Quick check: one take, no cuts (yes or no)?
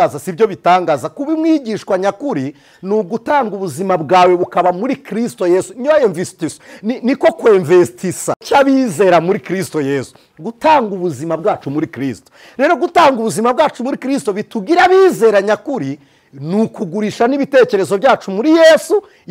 yes